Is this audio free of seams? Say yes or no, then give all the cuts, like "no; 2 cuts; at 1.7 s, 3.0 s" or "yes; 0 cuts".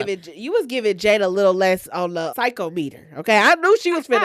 no; 1 cut; at 2.3 s